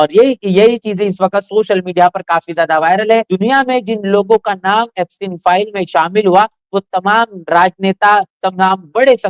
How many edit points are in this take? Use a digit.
1